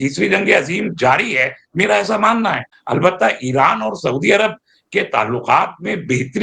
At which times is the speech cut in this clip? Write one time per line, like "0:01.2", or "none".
0:02.6